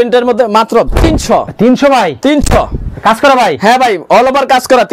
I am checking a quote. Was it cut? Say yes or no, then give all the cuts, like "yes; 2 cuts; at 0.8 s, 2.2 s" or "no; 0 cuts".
no; 0 cuts